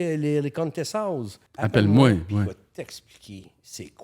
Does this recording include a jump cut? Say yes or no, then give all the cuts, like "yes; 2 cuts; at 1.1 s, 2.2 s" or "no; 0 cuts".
yes; 1 cut; at 1.4 s